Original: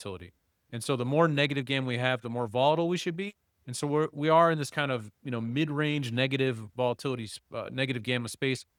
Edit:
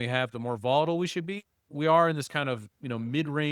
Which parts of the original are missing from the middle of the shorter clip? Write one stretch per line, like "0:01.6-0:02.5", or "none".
0:03.6-0:04.1

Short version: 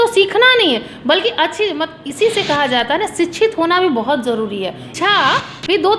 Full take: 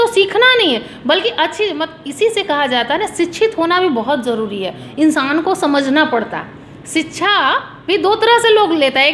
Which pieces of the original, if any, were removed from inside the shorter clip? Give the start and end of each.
0:04.9-0:07.1

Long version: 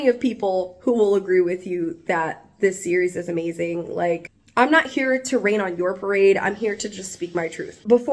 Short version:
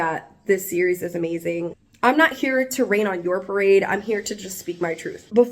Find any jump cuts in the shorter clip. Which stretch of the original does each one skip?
0:03.9-0:04.3

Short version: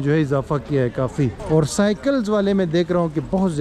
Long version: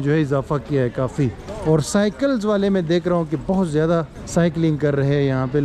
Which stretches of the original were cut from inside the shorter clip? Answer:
0:01.4-0:01.5

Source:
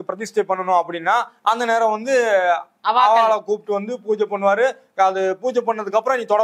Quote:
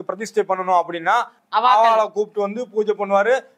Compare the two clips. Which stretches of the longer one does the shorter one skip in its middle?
0:01.3-0:02.7

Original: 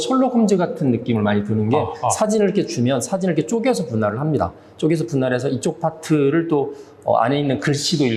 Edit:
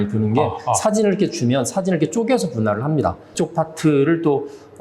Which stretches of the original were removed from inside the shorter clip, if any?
0:04.7-0:05.6

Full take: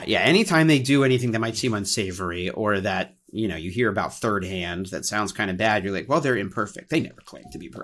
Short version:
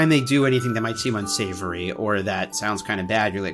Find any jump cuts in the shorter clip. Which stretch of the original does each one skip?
0:03.1-0:05.1

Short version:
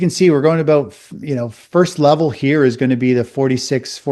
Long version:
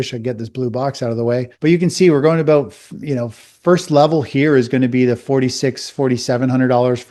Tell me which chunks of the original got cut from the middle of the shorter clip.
0:03.3-0:03.5

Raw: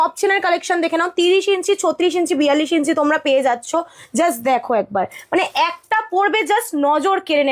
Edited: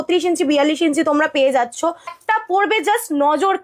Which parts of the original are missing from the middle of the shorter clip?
0:04.1-0:05.8

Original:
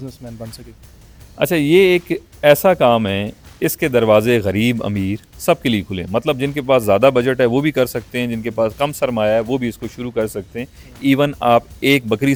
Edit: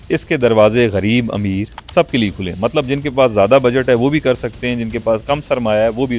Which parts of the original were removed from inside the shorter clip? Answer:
none

